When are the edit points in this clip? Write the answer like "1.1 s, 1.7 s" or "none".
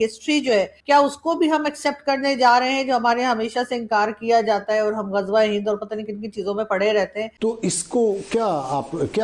7.3 s